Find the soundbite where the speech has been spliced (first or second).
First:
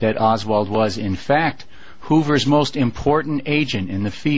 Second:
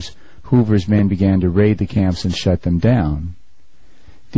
first